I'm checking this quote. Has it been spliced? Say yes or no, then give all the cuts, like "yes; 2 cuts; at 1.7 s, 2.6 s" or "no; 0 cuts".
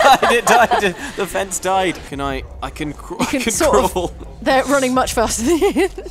yes; 1 cut; at 2.0 s